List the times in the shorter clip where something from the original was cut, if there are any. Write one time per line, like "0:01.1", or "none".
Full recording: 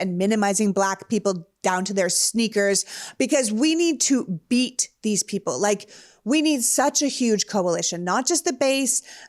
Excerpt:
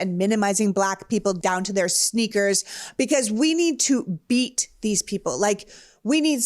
0:01.4